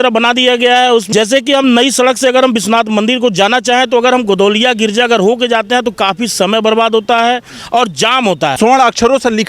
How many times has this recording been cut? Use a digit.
2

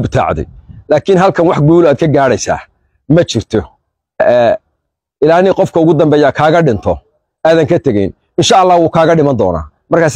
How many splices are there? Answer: 1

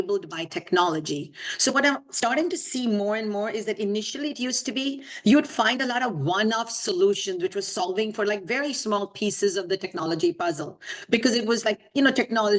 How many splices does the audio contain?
0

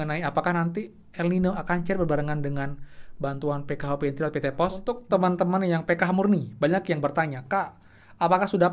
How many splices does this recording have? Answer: 1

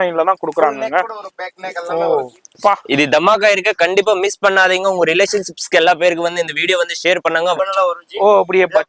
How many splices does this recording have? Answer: 1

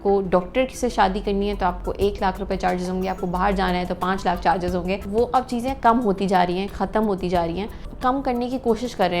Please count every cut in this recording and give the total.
0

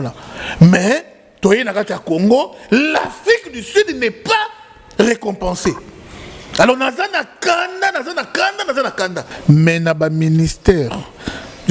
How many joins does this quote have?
1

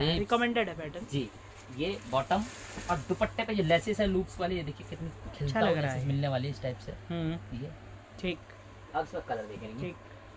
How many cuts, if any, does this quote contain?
0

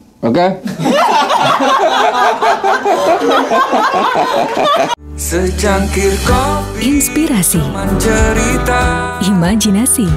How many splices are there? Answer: 1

